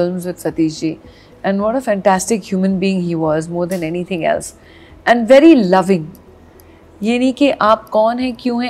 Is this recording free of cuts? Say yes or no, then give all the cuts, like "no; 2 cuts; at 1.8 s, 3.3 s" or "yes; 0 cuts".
yes; 0 cuts